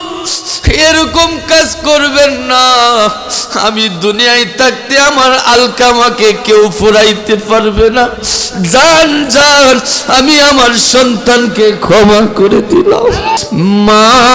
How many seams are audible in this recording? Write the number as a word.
one